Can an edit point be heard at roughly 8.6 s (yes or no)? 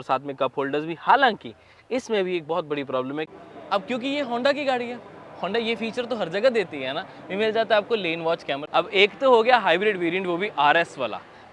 yes